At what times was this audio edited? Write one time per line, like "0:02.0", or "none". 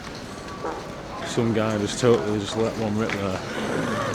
0:01.2